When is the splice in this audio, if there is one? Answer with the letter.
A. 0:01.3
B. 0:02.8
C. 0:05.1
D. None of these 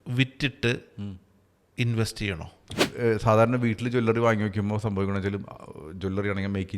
B